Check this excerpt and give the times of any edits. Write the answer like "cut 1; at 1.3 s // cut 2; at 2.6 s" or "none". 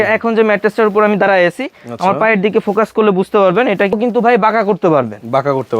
cut 1; at 3.9 s